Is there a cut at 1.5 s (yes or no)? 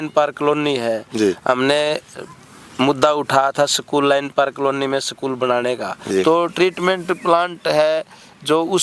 no